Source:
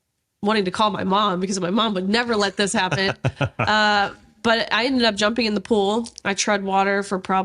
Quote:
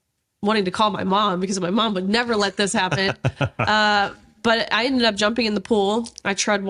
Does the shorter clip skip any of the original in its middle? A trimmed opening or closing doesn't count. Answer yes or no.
no